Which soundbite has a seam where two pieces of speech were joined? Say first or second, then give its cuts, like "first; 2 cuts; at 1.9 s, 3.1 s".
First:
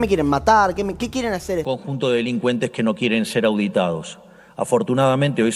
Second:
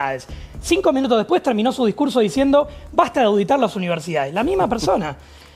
first; 1 cut; at 1.6 s